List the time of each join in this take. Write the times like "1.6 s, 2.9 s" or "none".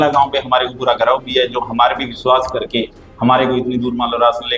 none